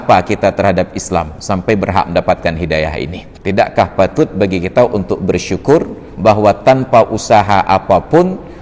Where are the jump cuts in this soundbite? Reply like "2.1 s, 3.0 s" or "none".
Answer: 3.2 s